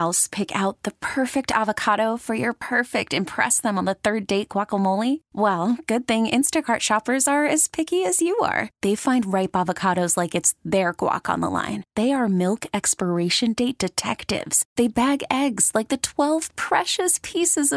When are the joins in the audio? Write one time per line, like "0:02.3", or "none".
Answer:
none